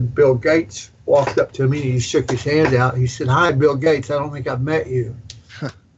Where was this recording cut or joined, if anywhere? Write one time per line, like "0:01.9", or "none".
none